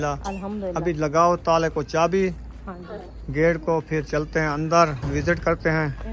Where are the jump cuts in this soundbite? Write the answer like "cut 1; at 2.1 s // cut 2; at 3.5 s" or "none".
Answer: none